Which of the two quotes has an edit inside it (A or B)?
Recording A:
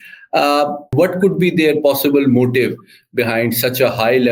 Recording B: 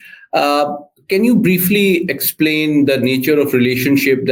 A